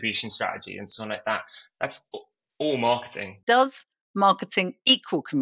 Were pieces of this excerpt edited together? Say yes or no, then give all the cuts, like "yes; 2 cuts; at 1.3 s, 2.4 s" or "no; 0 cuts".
yes; 1 cut; at 3.4 s